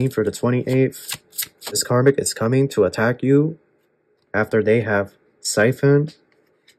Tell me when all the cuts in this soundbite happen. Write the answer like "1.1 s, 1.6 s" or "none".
1.8 s